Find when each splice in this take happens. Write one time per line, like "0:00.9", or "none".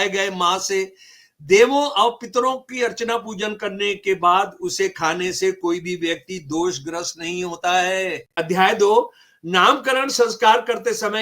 0:08.3